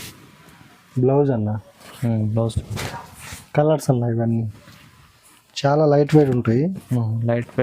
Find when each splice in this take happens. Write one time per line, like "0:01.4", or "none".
0:02.6